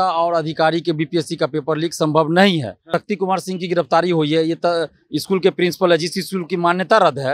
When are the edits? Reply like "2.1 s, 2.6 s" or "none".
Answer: 2.8 s